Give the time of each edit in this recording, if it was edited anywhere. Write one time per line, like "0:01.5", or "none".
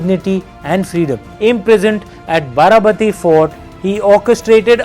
0:01.3

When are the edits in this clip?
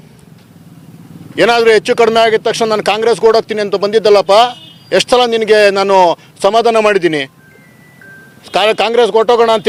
none

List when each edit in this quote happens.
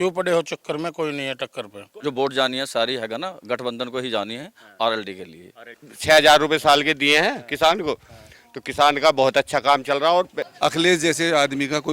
0:01.9
0:05.9
0:10.4

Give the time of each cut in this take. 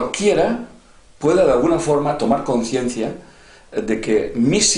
none

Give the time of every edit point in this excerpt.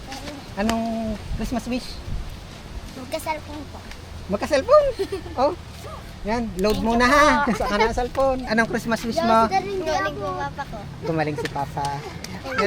0:08.4

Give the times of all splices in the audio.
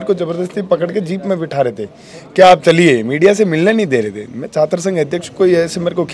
none

